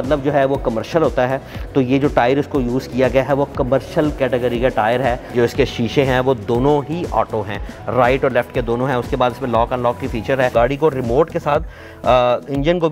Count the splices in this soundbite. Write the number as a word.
two